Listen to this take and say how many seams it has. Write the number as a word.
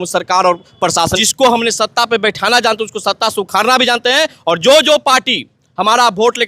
one